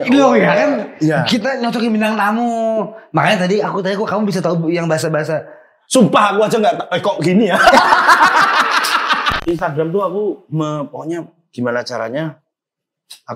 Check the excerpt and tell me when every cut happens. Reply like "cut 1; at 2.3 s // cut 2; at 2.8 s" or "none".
cut 1; at 9.3 s